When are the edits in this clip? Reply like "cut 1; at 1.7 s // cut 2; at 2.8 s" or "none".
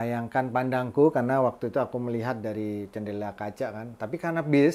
none